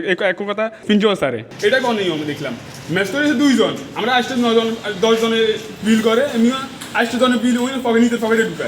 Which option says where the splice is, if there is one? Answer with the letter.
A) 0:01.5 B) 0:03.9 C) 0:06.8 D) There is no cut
A